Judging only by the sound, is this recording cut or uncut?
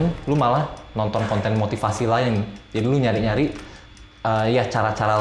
uncut